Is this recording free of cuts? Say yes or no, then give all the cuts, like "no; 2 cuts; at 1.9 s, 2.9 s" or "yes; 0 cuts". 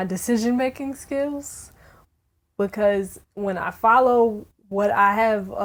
yes; 0 cuts